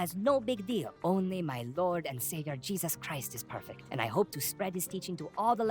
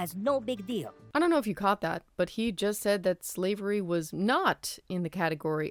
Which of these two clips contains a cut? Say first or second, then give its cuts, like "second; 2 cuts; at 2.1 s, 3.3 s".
first; 2 cuts; at 0.9 s, 3.8 s